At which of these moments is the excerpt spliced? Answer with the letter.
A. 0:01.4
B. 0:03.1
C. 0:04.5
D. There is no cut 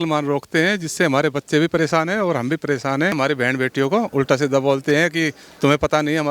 B